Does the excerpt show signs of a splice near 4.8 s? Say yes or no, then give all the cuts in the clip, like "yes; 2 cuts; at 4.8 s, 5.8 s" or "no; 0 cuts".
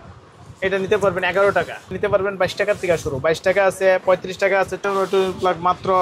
yes; 2 cuts; at 2.0 s, 4.8 s